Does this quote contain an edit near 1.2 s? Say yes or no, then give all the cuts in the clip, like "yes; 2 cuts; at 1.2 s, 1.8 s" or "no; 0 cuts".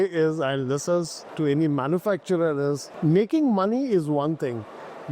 yes; 2 cuts; at 1.2 s, 2.9 s